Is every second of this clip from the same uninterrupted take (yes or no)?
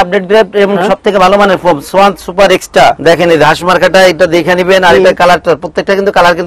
no